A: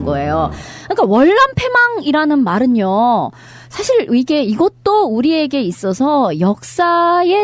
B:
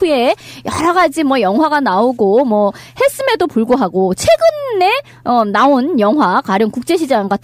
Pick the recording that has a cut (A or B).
A